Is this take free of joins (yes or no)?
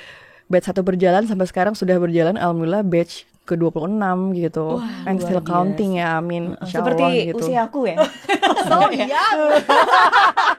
no